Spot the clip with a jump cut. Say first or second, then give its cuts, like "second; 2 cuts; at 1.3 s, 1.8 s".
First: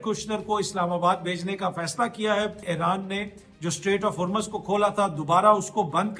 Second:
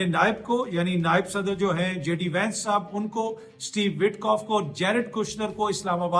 first; 1 cut; at 2.6 s